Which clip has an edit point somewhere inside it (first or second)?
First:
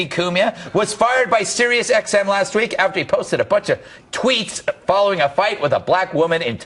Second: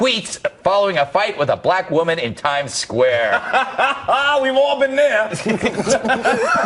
first